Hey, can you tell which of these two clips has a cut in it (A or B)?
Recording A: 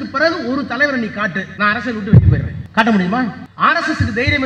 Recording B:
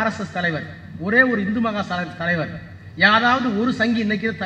A